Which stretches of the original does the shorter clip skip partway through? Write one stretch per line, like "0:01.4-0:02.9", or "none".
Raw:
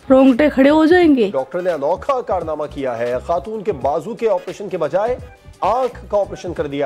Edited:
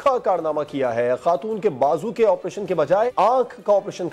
0:05.1-0:05.6